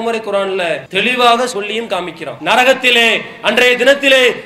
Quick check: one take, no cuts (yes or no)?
no